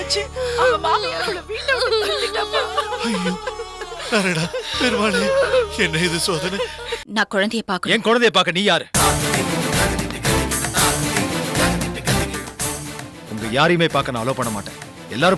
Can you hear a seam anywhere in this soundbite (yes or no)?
yes